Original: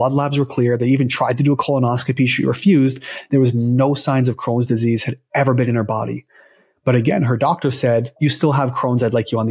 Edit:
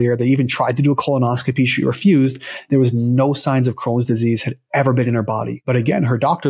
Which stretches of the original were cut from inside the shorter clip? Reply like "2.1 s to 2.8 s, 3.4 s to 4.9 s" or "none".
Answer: 6.2 s to 6.7 s

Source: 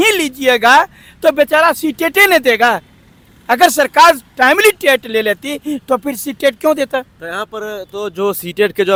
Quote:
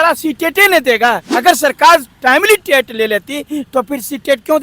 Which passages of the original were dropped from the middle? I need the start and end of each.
2.9 s to 3.4 s

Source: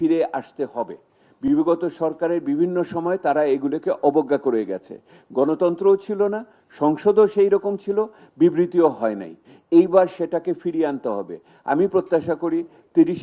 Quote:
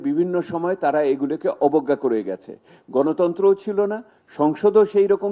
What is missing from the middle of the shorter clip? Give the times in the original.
none

